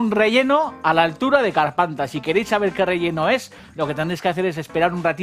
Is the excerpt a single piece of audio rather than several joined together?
yes; 0 cuts

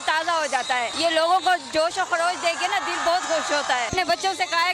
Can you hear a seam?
yes; 2 cuts; at 0.9 s, 3.9 s

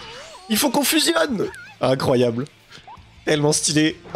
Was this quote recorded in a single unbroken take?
yes; 0 cuts

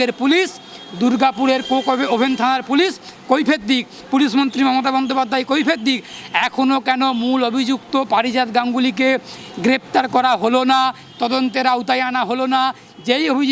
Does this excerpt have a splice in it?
no; 0 cuts

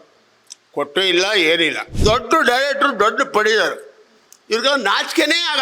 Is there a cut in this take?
yes; 1 cut; at 1.9 s

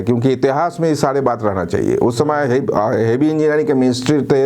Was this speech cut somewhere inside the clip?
no; 0 cuts

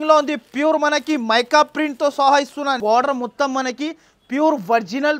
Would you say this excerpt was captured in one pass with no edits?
no; 1 cut; at 2.8 s

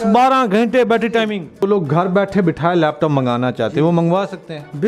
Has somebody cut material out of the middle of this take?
yes; 1 cut; at 1.6 s

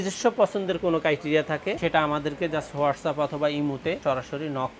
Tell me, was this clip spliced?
yes; 2 cuts; at 1.8 s, 4.0 s

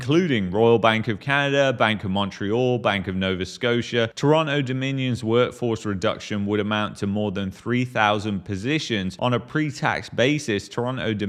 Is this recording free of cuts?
yes; 0 cuts

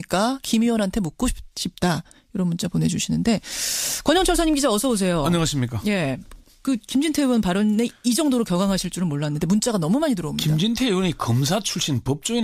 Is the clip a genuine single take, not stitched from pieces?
no; 1 cut; at 10.2 s

